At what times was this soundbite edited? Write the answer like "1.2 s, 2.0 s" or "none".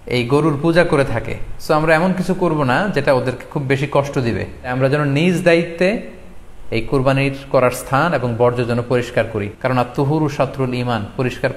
4.7 s, 9.5 s